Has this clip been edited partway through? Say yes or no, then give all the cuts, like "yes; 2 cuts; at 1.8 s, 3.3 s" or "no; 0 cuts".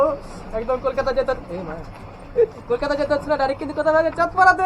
no; 0 cuts